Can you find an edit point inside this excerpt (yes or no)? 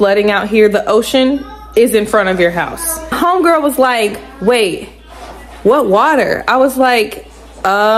yes